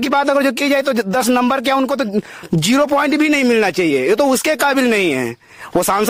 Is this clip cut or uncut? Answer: uncut